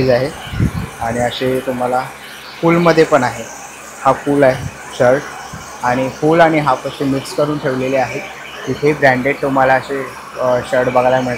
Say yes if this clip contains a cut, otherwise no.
no